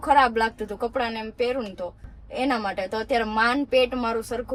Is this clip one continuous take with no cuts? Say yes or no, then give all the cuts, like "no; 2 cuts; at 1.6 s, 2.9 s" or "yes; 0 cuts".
yes; 0 cuts